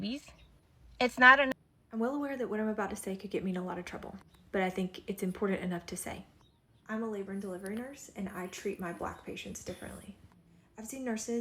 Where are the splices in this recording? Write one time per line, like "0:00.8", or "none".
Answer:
0:01.5